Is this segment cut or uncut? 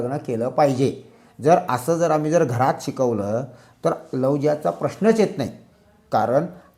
uncut